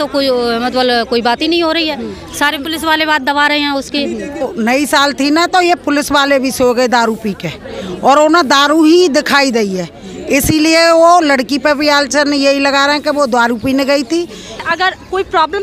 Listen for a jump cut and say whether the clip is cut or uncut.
cut